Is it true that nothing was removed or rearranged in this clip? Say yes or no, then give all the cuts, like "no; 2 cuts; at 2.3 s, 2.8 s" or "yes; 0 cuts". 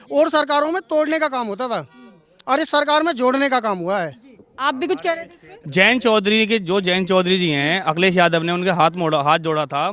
yes; 0 cuts